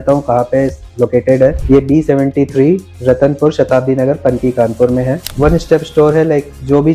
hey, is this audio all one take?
no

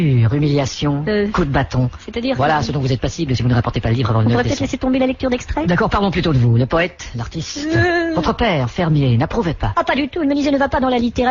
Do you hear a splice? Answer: no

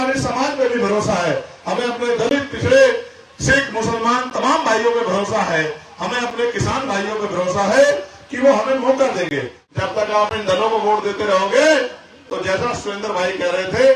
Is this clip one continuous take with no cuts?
no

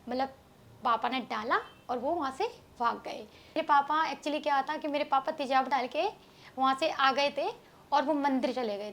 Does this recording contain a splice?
yes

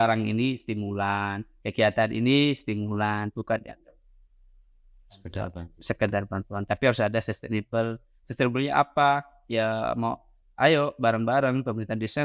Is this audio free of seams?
yes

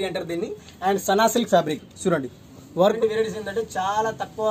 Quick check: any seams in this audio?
yes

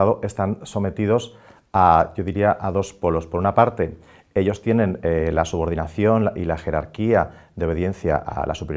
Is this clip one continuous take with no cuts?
no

